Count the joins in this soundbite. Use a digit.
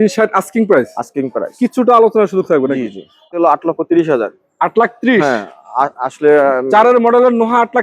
1